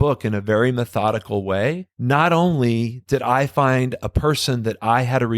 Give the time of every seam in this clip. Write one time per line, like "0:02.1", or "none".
0:01.9